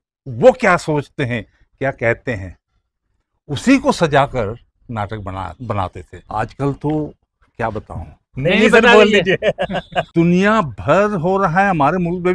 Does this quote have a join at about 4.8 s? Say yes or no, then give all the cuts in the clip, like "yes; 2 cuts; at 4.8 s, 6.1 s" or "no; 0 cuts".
no; 2 cuts; at 6.1 s, 10.0 s